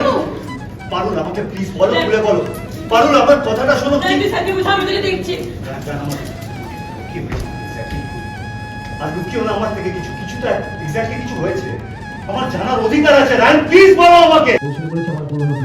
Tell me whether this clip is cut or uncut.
cut